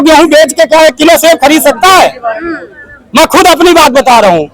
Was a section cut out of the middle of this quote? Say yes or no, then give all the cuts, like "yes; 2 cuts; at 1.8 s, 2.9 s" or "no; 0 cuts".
no; 0 cuts